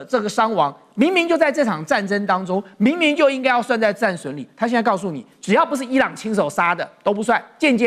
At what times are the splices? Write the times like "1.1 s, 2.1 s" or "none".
none